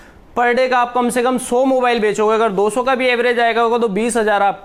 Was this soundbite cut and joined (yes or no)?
no